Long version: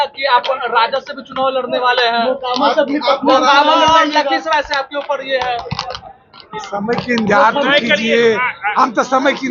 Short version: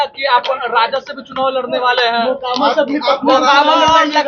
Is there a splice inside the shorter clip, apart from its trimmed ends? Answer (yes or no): no